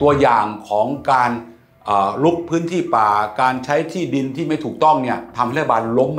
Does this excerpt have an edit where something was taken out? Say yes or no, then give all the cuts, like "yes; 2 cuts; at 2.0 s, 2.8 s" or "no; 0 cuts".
no; 0 cuts